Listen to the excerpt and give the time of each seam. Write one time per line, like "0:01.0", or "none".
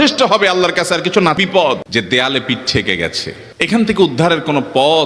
0:01.4